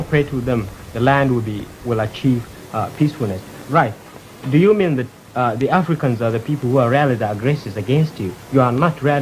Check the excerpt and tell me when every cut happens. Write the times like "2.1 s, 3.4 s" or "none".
none